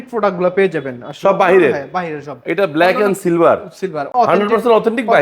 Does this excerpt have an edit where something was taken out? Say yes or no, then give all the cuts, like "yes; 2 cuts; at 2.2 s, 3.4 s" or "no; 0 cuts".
yes; 1 cut; at 4.0 s